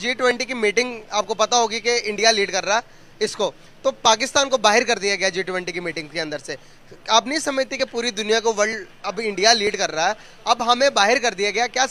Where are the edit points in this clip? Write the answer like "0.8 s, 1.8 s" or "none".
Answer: none